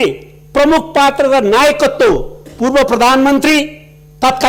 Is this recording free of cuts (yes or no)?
yes